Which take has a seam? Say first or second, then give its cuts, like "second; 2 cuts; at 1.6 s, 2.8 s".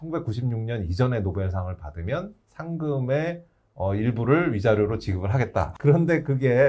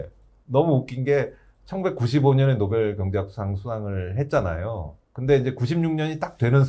first; 1 cut; at 5.7 s